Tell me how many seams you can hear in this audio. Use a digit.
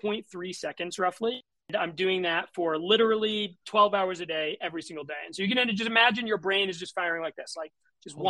1